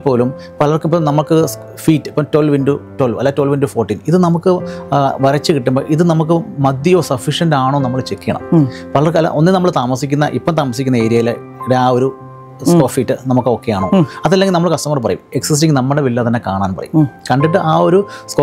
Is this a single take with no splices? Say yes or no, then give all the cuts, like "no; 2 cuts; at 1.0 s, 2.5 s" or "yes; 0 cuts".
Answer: yes; 0 cuts